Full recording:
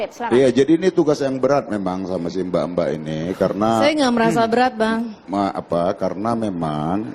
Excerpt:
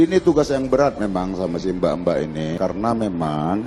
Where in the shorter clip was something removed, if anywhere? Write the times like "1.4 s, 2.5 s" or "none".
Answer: 2.6 s